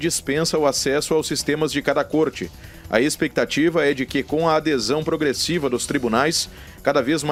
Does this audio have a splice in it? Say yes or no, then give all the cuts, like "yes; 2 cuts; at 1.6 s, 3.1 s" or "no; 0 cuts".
no; 0 cuts